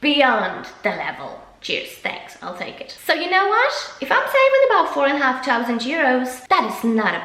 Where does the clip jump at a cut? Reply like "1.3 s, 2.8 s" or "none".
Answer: 1.4 s, 2.9 s